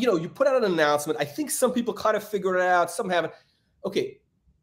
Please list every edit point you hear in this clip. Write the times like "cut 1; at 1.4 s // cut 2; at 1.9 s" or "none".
none

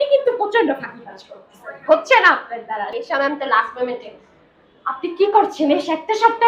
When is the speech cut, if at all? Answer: cut 1; at 2.9 s

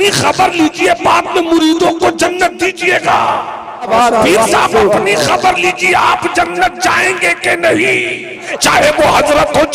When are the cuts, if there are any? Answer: cut 1; at 3.9 s // cut 2; at 8.5 s

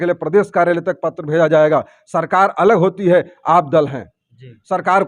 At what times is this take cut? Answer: none

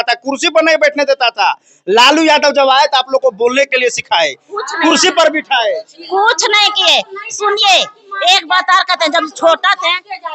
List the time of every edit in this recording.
none

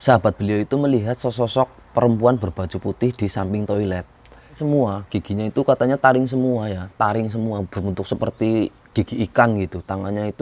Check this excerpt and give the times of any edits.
cut 1; at 4.6 s

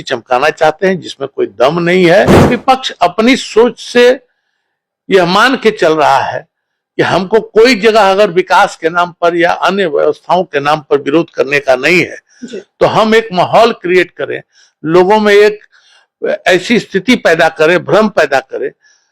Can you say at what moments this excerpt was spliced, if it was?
cut 1; at 2.5 s

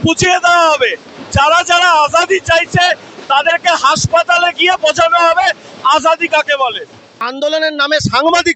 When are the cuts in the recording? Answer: cut 1; at 7.3 s

